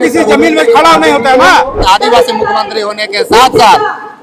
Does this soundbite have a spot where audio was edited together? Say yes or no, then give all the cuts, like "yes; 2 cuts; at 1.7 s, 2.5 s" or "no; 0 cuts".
yes; 1 cut; at 1.8 s